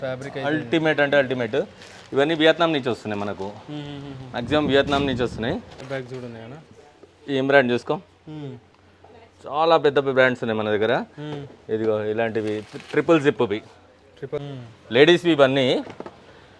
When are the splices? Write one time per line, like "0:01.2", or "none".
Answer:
0:05.8
0:14.4